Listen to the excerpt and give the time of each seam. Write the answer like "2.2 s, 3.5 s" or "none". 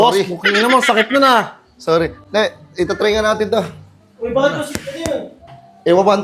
none